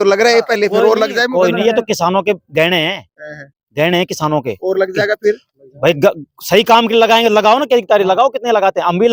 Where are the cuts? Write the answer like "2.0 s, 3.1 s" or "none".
none